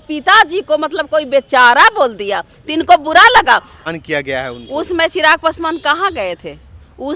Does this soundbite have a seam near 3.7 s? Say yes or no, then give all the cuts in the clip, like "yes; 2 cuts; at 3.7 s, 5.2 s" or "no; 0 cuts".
yes; 1 cut; at 3.7 s